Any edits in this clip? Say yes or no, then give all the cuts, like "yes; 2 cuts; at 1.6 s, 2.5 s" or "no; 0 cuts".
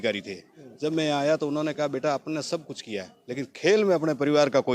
no; 0 cuts